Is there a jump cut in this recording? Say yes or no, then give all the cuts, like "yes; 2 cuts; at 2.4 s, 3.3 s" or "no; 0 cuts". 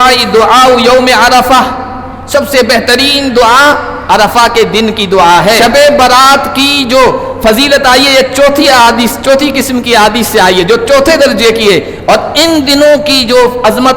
yes; 1 cut; at 5.6 s